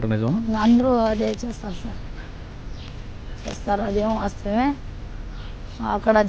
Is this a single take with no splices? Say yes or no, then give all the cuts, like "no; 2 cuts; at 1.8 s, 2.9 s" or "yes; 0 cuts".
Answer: yes; 0 cuts